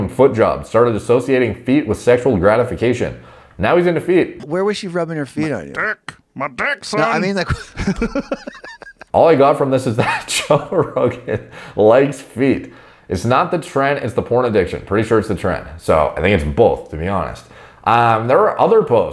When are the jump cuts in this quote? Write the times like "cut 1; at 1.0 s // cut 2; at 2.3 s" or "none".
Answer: cut 1; at 4.4 s // cut 2; at 9.1 s